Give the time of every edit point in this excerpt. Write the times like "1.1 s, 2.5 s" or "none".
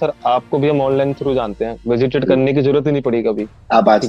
none